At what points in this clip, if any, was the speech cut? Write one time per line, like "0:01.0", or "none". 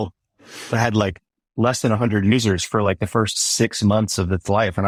none